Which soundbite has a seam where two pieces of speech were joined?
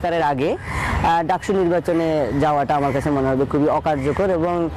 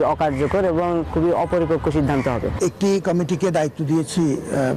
second; 1 cut; at 2.5 s

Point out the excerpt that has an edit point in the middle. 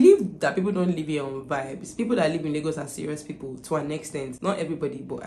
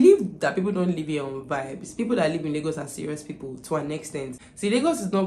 second; 1 cut; at 4.3 s

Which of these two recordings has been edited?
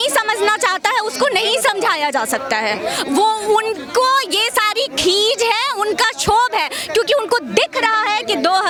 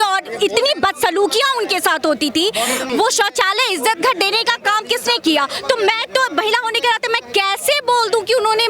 second; 1 cut; at 2.9 s

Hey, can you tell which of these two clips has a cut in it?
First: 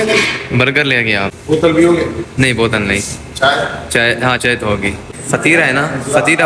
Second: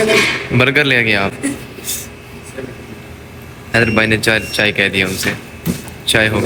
first; 2 cuts; at 1.4 s, 5.1 s

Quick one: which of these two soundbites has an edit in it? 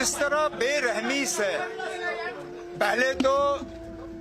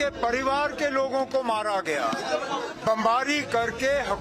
second; 1 cut; at 2.2 s

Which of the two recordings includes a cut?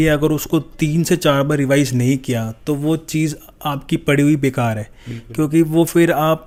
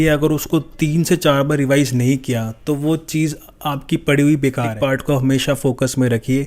second; 1 cut; at 4.8 s

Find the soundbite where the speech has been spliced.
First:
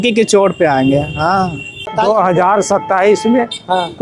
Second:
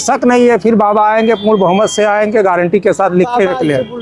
first; 1 cut; at 1.9 s

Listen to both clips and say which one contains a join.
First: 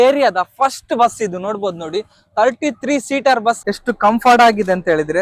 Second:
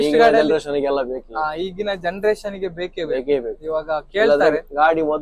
first; 1 cut; at 3.6 s

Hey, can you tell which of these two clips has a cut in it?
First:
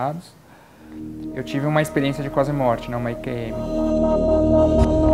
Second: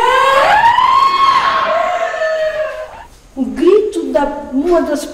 second; 1 cut; at 2.8 s

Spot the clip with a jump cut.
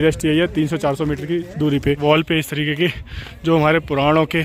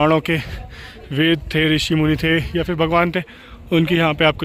first; 1 cut; at 2.0 s

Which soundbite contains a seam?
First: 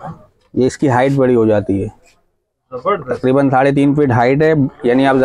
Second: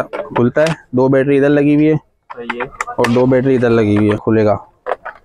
second; 1 cut; at 4.2 s

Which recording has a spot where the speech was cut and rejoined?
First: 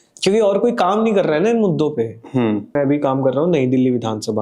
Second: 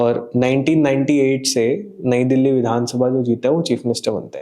first; 1 cut; at 2.8 s

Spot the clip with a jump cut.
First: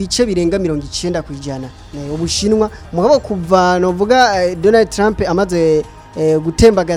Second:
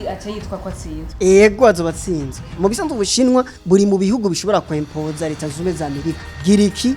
second; 2 cuts; at 2.4 s, 3.6 s

